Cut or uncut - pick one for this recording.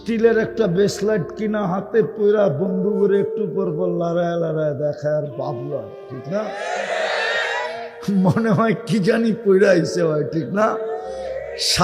uncut